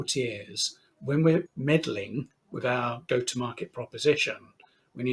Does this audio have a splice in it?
yes; 1 cut; at 1.5 s

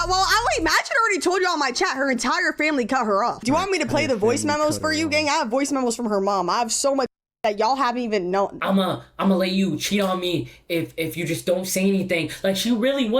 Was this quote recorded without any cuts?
no; 3 cuts; at 3.4 s, 5.5 s, 8.6 s

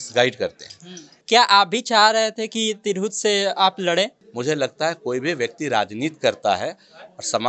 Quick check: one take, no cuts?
no; 2 cuts; at 1.2 s, 4.2 s

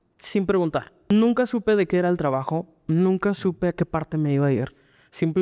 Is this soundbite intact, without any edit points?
no; 1 cut; at 1.1 s

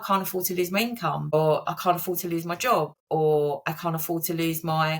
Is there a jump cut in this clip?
yes; 2 cuts; at 1.3 s, 3.0 s

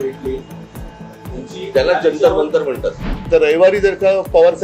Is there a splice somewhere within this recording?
yes; 1 cut; at 3.1 s

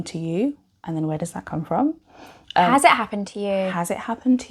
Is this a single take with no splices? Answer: yes; 0 cuts

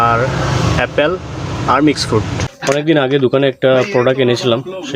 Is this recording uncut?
no; 1 cut; at 2.4 s

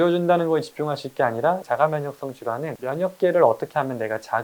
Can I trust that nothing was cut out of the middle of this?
no; 1 cut; at 2.8 s

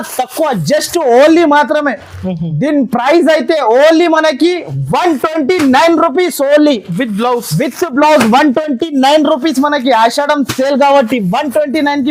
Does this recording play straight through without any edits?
yes; 0 cuts

